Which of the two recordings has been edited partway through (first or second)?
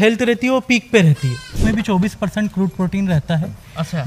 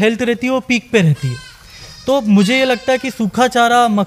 first